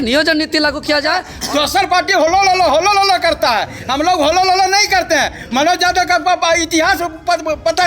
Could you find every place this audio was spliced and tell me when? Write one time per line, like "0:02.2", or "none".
0:01.3